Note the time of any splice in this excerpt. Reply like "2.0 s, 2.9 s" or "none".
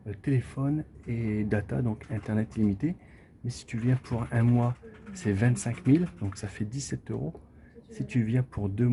none